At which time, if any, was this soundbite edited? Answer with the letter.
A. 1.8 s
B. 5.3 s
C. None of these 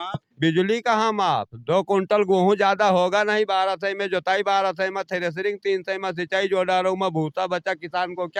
C